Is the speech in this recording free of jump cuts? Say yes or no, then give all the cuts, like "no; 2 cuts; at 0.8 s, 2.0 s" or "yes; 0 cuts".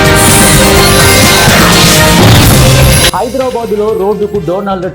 no; 2 cuts; at 1.7 s, 3.1 s